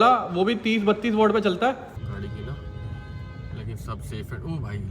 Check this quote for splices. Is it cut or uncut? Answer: cut